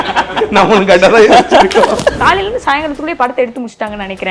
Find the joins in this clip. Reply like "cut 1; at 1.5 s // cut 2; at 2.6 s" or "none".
cut 1; at 2.2 s